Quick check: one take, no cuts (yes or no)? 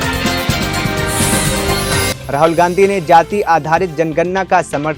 yes